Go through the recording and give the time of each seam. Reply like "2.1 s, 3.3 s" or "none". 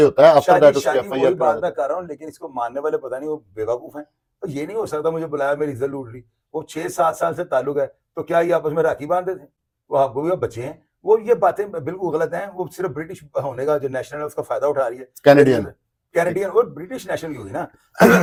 none